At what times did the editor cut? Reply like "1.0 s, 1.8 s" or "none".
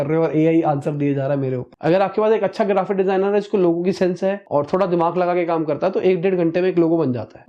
1.7 s